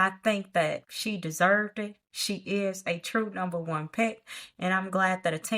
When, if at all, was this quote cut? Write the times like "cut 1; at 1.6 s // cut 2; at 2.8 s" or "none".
cut 1; at 0.9 s